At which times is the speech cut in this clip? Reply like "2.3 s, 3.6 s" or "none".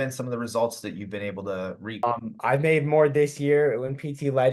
2.0 s